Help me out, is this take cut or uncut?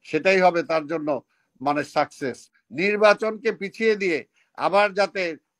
cut